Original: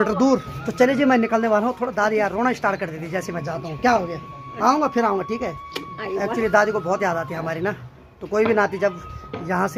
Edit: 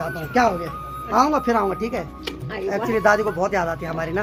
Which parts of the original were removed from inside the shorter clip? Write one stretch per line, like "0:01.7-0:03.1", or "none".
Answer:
none